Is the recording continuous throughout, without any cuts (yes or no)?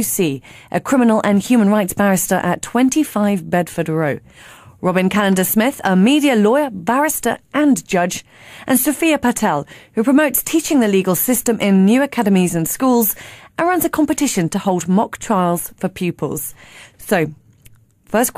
no